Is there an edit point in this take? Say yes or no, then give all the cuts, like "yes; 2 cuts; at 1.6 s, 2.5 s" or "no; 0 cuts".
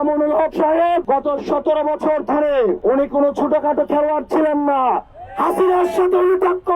yes; 2 cuts; at 1.0 s, 2.8 s